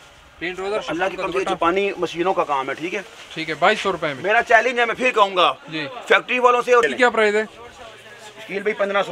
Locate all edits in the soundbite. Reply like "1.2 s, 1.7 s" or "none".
6.8 s

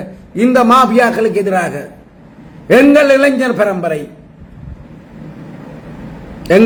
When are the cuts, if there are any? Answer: none

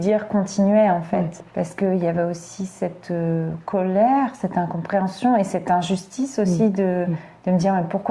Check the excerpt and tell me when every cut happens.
1.4 s

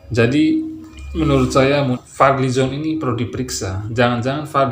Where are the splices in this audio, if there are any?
1.9 s

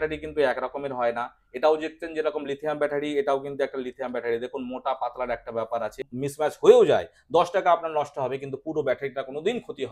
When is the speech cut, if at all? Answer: 6.0 s

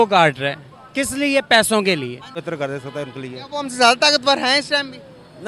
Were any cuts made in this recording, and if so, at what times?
2.4 s

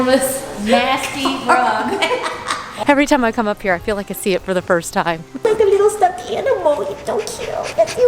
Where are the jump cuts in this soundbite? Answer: 2.7 s, 5.4 s

